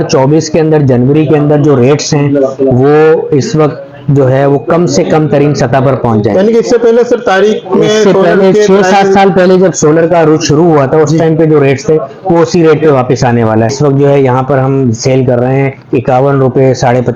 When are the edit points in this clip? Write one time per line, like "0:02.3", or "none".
0:13.8

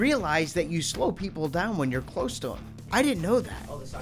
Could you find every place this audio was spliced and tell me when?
none

